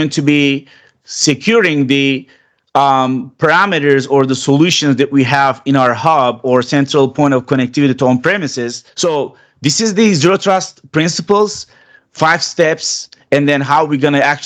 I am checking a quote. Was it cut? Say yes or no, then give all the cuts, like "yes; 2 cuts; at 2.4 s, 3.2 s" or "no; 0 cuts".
yes; 1 cut; at 8.8 s